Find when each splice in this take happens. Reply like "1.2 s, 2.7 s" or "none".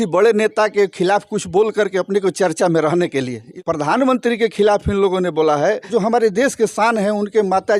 3.5 s, 5.8 s